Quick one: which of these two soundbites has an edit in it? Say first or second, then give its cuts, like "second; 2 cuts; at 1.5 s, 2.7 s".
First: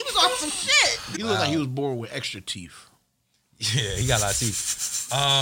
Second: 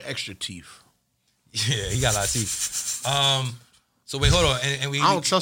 first; 1 cut; at 1.0 s